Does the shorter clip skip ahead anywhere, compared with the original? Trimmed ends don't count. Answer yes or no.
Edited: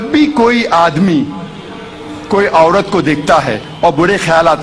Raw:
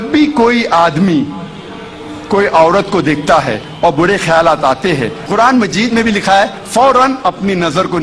no